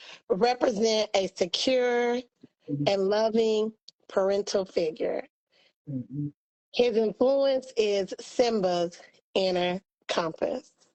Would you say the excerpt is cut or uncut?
uncut